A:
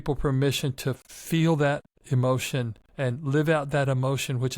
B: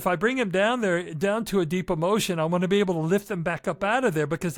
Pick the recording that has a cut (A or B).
A